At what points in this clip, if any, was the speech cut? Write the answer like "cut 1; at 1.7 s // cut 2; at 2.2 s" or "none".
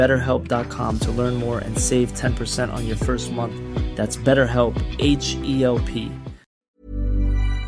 cut 1; at 6.6 s